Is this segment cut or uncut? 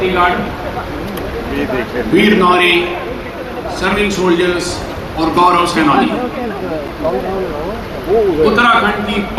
uncut